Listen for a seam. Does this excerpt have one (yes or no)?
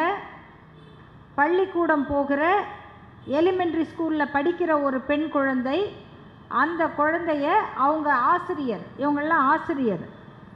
no